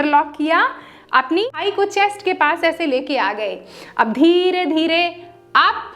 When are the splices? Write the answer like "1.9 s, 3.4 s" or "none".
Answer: 1.5 s